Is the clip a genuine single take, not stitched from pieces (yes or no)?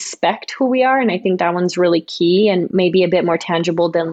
no